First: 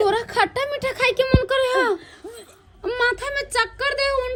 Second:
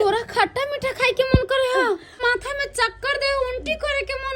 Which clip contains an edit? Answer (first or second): second